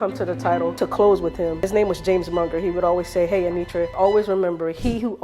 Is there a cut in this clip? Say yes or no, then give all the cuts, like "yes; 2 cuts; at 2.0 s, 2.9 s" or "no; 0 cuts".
yes; 3 cuts; at 0.7 s, 1.7 s, 3.9 s